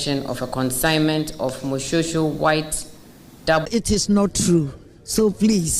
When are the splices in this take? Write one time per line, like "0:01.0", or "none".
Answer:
0:03.7